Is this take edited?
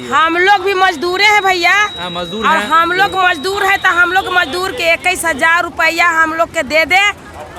no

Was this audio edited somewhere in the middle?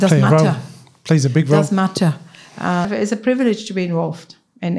yes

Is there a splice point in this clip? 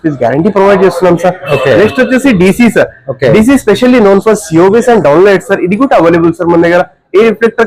no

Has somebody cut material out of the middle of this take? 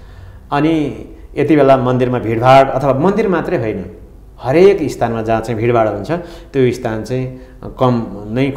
no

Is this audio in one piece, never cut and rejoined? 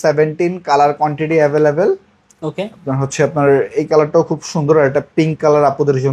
yes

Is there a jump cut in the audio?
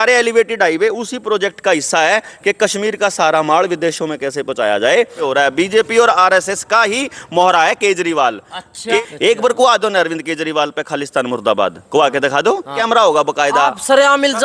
yes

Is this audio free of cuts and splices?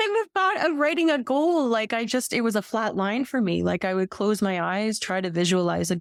yes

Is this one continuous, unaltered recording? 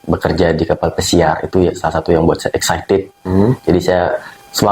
yes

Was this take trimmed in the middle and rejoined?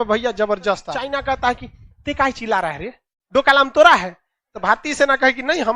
yes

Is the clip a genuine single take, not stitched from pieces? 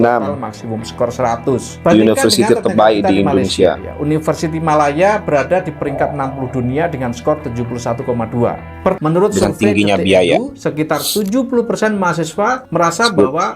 no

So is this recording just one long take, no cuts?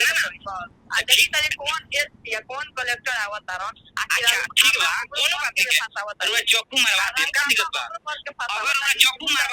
yes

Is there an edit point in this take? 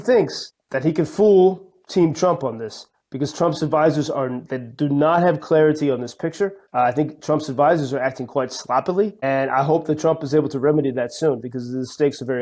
no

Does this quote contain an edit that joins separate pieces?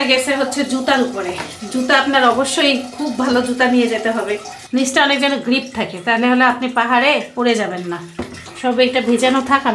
no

